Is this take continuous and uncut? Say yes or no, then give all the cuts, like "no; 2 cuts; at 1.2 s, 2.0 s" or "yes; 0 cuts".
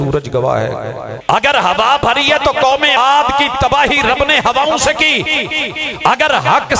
no; 2 cuts; at 1.1 s, 3.0 s